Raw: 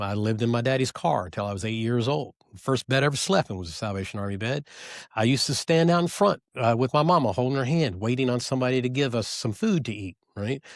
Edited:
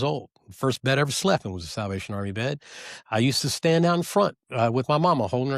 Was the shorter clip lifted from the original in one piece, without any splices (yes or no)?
yes